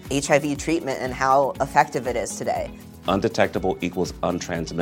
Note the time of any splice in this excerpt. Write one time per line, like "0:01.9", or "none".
none